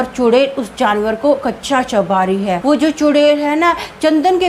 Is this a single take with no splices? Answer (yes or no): no